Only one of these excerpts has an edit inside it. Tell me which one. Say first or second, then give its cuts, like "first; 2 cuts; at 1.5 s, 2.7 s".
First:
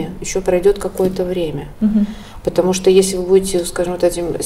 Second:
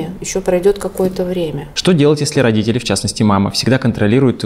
second; 1 cut; at 1.6 s